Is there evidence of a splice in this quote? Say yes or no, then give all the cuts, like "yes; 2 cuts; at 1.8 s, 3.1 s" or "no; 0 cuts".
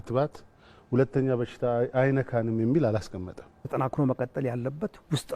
yes; 1 cut; at 3.6 s